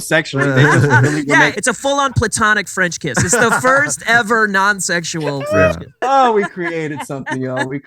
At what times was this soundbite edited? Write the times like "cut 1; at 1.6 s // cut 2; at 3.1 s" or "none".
cut 1; at 1.5 s // cut 2; at 5.9 s